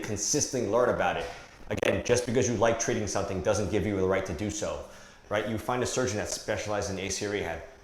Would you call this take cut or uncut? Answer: cut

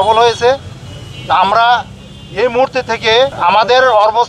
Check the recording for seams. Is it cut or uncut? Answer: cut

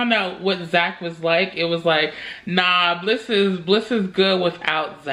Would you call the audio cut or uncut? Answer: uncut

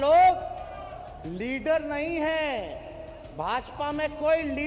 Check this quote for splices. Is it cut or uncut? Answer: uncut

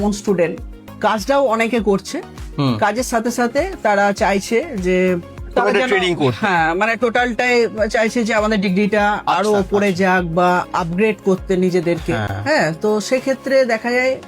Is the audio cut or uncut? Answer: uncut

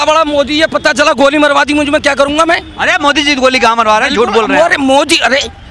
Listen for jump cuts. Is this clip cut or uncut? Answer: uncut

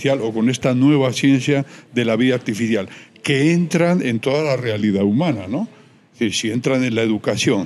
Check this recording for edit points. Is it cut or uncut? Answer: uncut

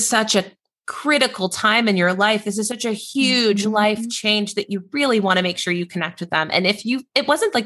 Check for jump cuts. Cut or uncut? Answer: uncut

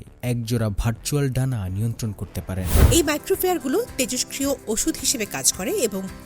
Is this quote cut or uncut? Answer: cut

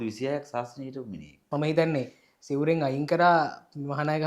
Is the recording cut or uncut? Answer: cut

